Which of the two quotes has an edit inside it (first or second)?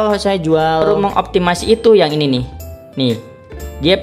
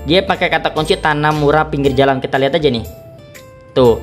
first